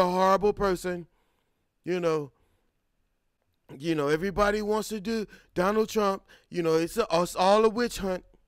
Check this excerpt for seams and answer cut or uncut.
uncut